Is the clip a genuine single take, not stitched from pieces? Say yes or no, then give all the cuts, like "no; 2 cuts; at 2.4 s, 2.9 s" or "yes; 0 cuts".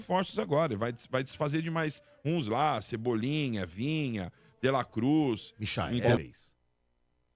no; 1 cut; at 6.2 s